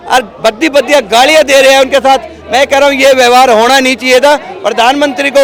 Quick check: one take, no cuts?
yes; 0 cuts

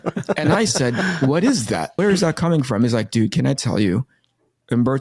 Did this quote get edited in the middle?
yes; 1 cut; at 1.9 s

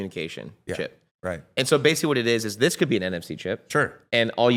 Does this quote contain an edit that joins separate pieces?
no; 0 cuts

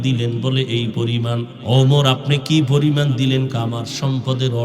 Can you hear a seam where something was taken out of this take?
yes; 1 cut; at 1.5 s

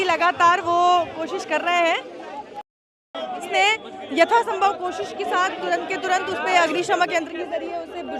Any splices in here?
yes; 1 cut; at 3.5 s

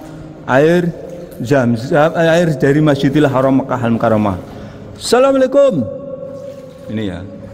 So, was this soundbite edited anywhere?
no; 0 cuts

